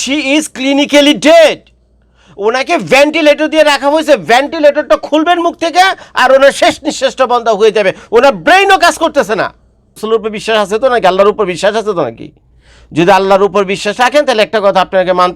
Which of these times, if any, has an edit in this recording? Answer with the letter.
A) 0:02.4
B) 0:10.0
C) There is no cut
B